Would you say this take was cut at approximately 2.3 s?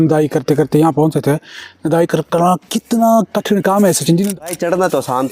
no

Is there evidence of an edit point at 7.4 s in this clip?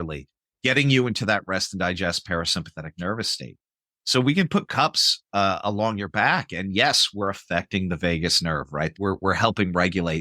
no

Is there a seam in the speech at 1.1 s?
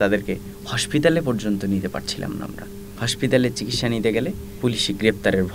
no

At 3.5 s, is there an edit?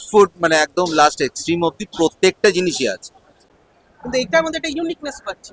yes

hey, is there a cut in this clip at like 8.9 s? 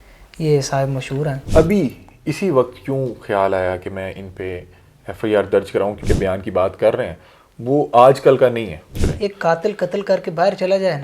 yes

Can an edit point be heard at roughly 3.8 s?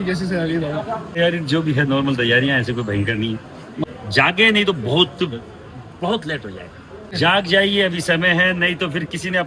yes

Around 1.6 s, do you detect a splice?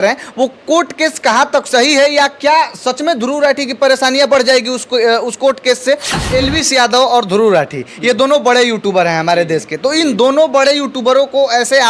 no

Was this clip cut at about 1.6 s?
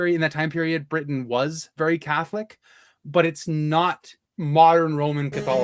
no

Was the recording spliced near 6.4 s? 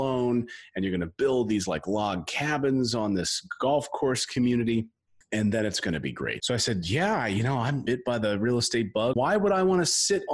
yes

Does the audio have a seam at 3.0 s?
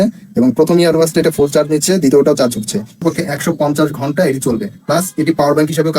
yes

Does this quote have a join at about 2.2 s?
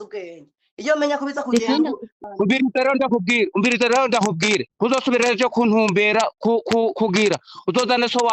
yes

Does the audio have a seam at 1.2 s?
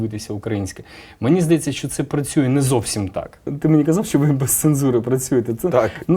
no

